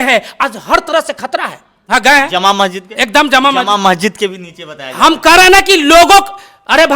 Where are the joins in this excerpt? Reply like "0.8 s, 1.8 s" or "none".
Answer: 1.8 s